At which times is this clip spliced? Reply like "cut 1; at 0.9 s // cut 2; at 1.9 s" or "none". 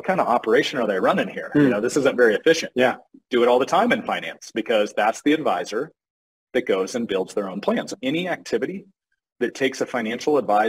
cut 1; at 7.9 s